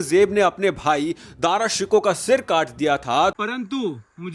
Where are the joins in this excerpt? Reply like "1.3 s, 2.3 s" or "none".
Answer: 3.4 s